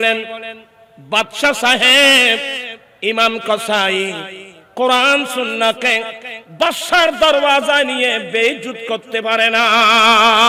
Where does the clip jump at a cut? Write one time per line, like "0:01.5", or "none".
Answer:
none